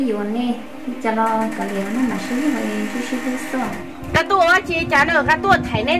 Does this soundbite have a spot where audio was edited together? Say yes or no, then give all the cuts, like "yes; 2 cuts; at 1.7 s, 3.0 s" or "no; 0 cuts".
yes; 1 cut; at 4.1 s